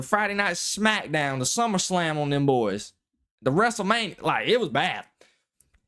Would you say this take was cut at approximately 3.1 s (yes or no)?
no